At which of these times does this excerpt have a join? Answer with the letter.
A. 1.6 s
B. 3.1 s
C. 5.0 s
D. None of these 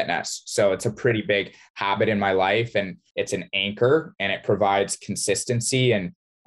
B